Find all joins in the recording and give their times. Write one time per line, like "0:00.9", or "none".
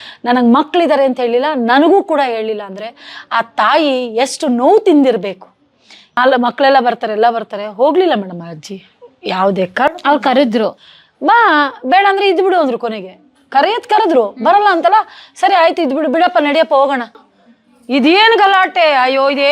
0:06.2
0:17.2